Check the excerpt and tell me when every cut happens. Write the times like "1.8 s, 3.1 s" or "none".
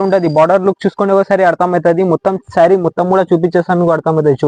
none